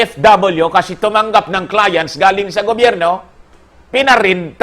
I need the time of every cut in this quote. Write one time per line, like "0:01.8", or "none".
none